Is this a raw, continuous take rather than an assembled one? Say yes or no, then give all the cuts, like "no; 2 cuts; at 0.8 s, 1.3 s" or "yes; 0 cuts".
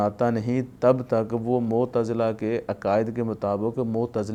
yes; 0 cuts